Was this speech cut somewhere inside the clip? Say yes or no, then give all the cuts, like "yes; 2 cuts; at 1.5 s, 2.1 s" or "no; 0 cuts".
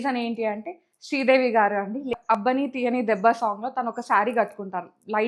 yes; 1 cut; at 2.4 s